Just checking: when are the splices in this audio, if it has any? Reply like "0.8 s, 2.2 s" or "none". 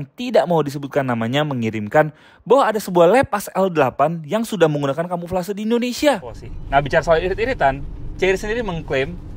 6.5 s